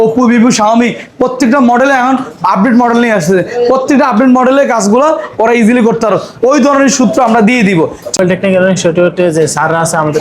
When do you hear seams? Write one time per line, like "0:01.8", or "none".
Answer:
0:08.1